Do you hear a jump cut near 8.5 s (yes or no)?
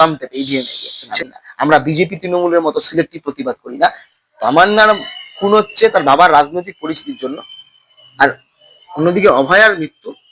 no